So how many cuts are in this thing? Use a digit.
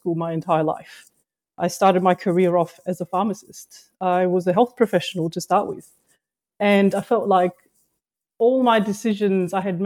0